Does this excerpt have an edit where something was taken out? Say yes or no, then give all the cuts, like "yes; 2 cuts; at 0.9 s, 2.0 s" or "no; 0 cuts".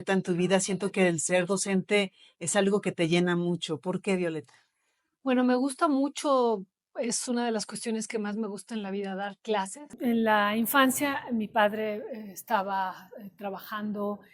yes; 1 cut; at 9.9 s